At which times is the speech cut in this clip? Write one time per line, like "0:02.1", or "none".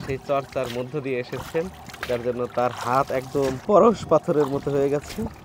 0:03.6